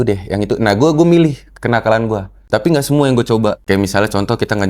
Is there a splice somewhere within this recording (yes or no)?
yes